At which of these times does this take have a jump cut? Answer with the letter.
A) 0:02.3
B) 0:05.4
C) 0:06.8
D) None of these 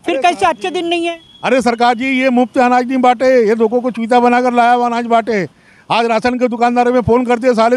D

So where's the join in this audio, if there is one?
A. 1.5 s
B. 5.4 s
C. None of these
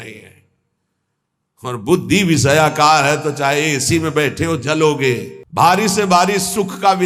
B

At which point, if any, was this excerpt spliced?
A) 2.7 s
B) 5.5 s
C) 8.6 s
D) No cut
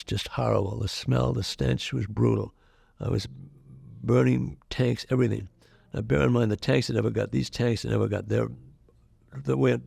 D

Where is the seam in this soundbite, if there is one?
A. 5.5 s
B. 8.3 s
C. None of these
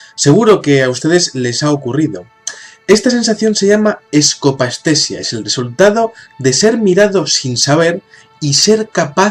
A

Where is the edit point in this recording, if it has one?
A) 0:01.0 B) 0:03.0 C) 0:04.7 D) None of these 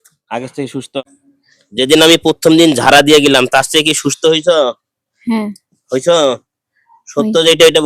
A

